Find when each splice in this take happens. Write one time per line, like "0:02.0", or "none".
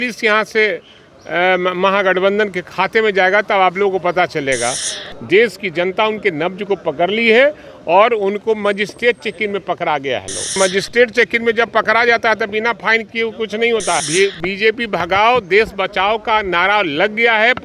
0:04.9
0:10.6
0:14.1